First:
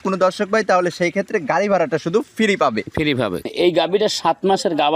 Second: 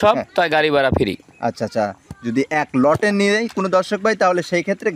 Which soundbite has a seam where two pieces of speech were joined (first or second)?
first